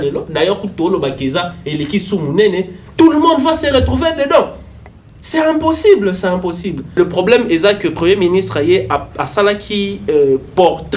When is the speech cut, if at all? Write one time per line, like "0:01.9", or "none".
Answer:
0:07.0